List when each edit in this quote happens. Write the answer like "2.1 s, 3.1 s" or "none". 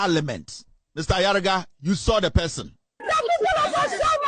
3.0 s

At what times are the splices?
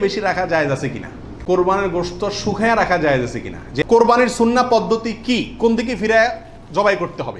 1.3 s, 3.8 s

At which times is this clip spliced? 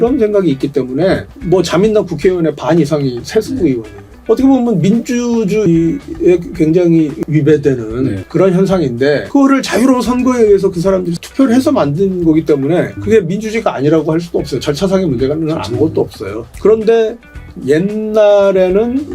4.1 s, 7.2 s

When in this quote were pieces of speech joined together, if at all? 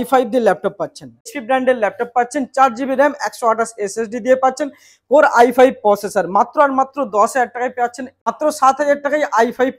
1.4 s, 8.3 s

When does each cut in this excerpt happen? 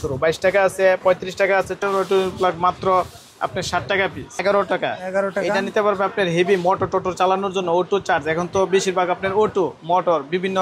1.7 s, 4.4 s

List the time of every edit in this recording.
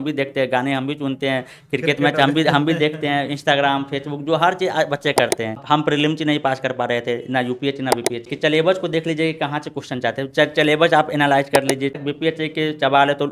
5.6 s, 8.3 s, 12.0 s

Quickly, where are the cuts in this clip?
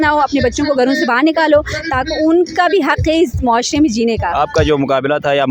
4.3 s

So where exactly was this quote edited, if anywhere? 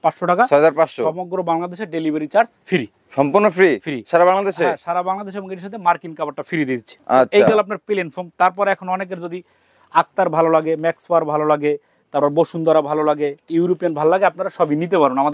none

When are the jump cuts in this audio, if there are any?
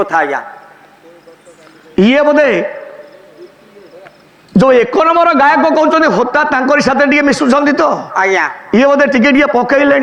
none

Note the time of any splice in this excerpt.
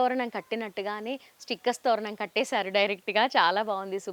none

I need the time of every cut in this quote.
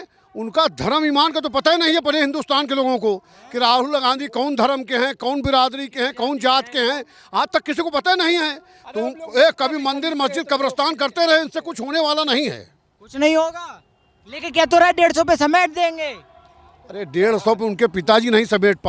none

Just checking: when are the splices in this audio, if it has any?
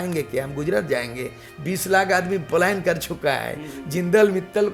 none

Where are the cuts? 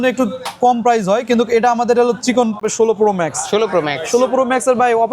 2.7 s

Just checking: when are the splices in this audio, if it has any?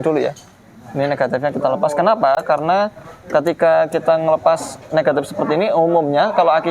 none

